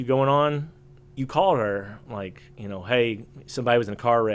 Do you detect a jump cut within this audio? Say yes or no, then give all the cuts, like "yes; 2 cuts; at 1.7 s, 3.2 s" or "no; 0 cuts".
no; 0 cuts